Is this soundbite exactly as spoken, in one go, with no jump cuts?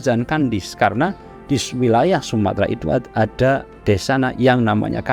yes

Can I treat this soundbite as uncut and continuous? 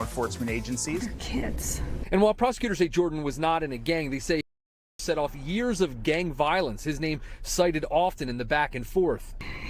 no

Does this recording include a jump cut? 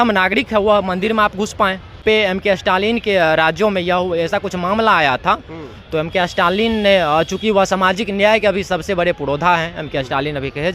yes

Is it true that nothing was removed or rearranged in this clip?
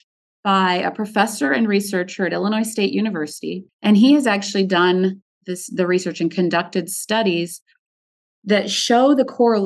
no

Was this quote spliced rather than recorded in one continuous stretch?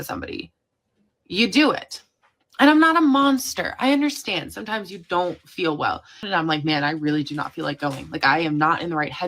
yes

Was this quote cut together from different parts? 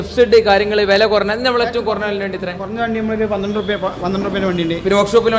no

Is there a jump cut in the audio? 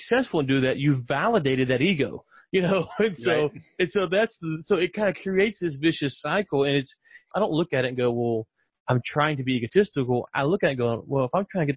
no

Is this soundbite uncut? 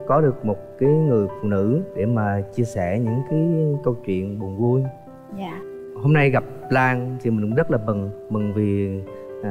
yes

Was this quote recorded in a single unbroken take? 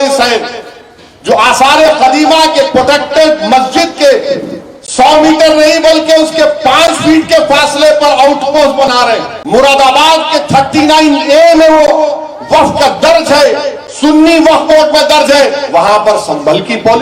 no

